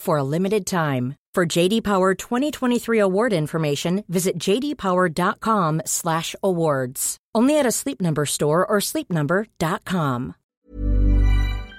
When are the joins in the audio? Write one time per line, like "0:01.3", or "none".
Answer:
0:10.5